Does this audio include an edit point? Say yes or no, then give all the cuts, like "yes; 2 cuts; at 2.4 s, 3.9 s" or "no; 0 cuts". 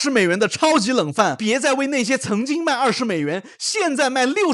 yes; 1 cut; at 1.4 s